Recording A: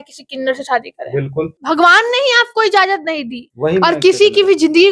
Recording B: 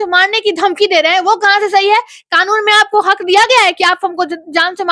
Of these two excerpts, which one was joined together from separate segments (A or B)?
A